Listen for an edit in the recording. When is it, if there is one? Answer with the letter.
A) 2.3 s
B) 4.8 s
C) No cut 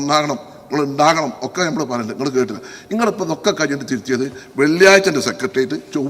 C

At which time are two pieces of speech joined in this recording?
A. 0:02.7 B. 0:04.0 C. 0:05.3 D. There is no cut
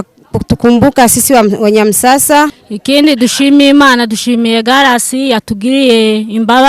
A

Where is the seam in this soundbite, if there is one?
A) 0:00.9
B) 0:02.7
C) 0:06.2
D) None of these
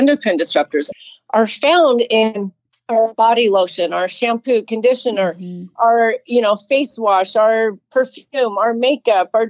A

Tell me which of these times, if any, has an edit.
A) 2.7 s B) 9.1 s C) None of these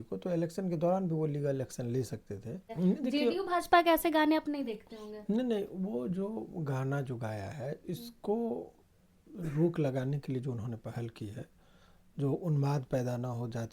A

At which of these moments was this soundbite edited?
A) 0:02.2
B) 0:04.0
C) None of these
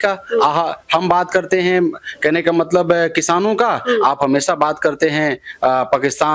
C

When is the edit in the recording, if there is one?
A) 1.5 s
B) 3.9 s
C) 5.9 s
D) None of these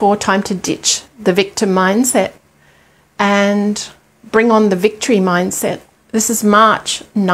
C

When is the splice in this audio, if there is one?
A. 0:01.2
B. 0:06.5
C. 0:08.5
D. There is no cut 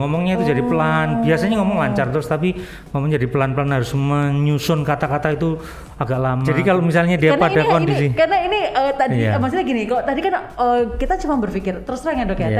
B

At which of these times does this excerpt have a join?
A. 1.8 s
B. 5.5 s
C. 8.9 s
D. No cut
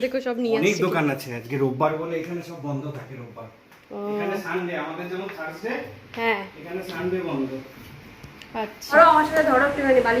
C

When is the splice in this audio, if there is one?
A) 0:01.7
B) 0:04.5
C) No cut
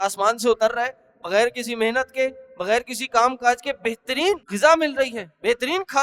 B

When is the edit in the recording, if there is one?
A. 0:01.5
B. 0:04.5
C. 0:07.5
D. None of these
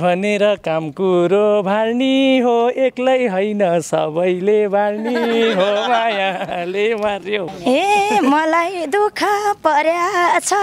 C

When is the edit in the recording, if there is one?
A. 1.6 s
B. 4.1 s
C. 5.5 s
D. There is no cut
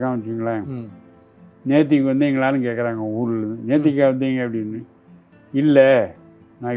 D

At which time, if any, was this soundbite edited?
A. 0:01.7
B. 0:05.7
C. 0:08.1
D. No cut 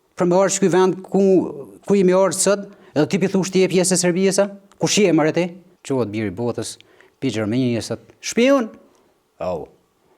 B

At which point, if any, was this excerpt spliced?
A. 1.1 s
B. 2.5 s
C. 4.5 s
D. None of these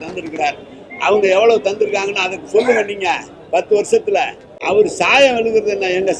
C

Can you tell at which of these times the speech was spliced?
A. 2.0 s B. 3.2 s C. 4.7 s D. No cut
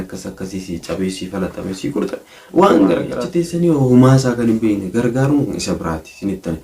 B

